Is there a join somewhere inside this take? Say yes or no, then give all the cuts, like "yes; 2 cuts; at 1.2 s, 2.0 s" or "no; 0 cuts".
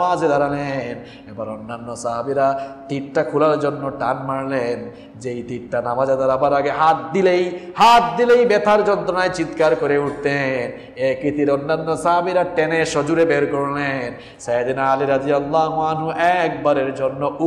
no; 0 cuts